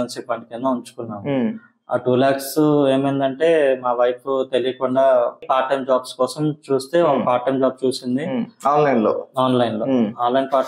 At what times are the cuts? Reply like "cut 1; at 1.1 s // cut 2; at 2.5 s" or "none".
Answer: cut 1; at 5.4 s